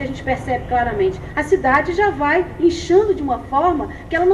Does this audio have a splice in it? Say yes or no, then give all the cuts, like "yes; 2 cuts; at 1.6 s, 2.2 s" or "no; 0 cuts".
no; 0 cuts